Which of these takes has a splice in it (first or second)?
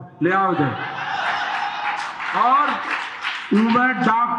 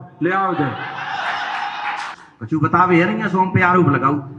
second